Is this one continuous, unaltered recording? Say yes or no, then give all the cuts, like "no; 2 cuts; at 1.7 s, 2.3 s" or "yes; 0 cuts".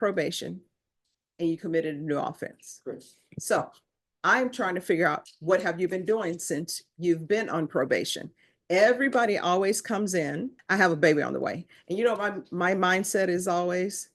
no; 1 cut; at 10.6 s